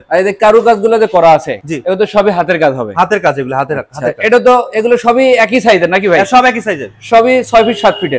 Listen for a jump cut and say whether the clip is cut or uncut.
uncut